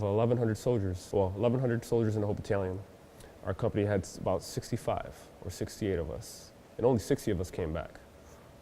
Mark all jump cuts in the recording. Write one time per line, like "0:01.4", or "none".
0:01.0